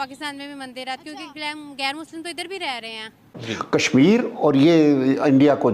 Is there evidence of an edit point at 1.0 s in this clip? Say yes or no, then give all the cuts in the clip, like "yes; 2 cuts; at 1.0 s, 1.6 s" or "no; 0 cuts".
no; 1 cut; at 3.5 s